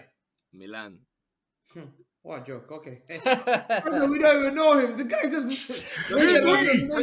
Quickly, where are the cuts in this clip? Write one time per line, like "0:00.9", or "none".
none